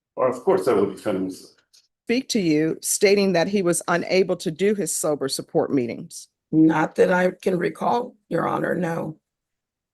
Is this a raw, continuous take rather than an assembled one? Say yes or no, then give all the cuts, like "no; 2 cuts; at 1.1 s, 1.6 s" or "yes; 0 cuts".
no; 1 cut; at 2.0 s